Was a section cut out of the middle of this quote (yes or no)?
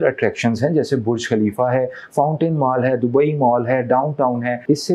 no